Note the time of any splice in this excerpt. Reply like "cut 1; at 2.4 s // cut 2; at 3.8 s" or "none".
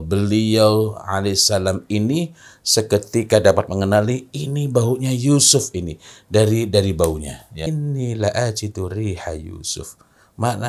cut 1; at 7.6 s